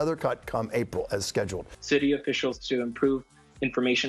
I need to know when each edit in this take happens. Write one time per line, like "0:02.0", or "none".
0:01.8